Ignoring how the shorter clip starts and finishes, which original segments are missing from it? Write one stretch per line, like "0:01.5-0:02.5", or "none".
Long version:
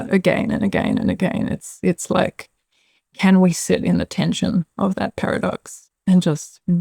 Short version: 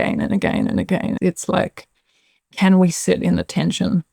0:01.5-0:01.8